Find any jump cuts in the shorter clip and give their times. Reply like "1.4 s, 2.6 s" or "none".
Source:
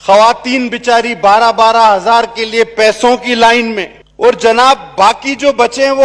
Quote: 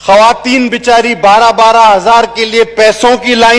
none